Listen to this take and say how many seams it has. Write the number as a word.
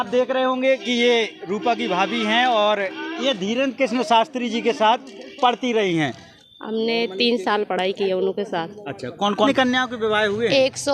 two